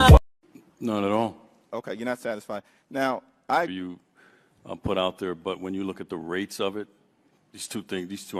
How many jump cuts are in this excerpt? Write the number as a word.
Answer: zero